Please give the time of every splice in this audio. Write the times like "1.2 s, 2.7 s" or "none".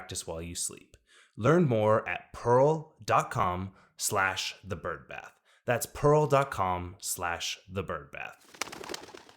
8.4 s